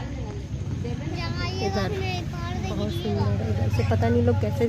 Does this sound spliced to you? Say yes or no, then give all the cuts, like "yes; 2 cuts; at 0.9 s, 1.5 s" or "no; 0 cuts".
no; 0 cuts